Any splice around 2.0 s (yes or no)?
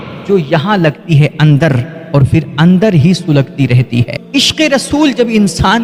no